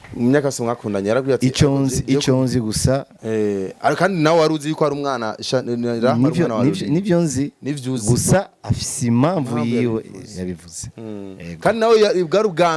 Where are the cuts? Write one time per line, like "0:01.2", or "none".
0:03.1